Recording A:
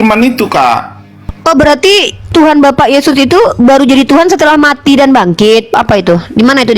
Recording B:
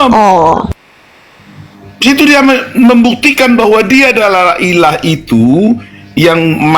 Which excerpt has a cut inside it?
A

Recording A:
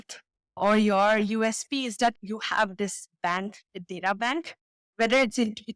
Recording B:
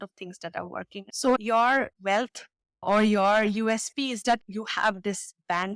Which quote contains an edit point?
B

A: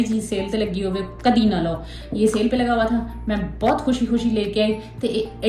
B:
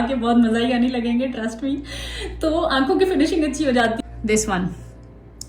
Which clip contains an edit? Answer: B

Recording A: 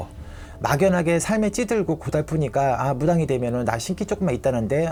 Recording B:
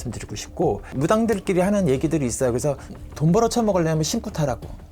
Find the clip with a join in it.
B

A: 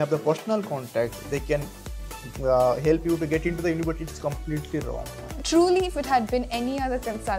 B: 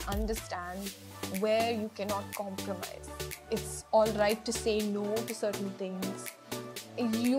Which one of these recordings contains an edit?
A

